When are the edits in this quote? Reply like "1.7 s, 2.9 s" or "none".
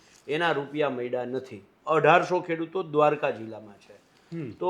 none